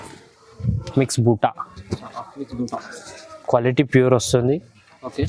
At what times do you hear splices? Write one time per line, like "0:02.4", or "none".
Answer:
0:00.9

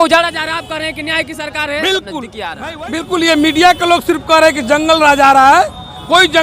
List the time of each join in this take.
0:02.6

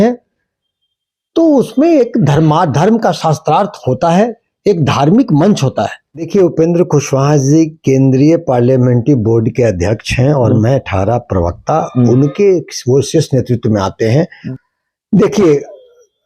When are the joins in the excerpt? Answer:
0:06.3
0:14.4

